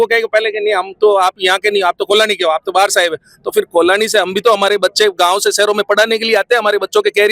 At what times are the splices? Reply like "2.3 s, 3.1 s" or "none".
none